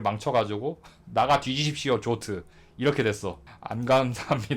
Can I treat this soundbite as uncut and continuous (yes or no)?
no